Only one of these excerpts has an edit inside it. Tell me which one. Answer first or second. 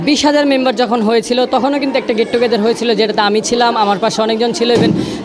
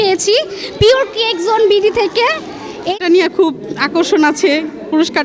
second